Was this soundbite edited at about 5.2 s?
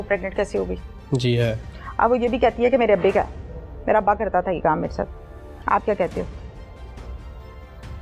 no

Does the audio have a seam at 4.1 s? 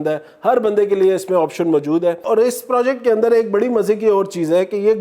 no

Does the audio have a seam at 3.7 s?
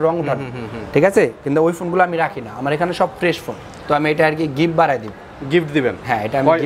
yes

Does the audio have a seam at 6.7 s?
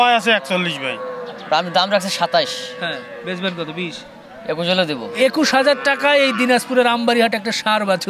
no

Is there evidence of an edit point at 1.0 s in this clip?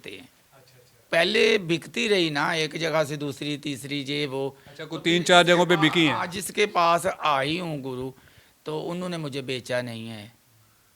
yes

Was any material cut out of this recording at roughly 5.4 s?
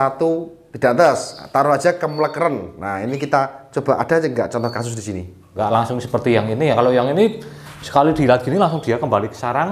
yes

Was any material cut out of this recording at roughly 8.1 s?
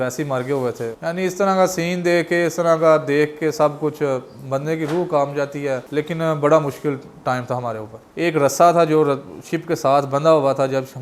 yes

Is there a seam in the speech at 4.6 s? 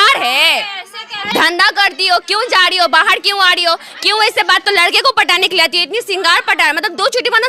yes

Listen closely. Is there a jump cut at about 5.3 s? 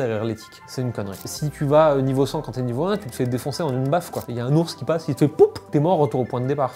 no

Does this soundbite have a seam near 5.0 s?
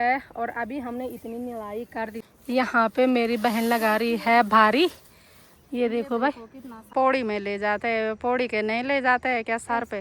no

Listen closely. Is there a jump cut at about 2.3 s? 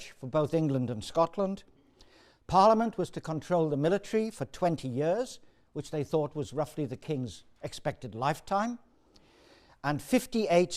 yes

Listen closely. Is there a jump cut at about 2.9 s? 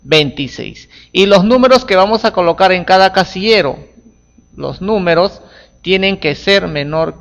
yes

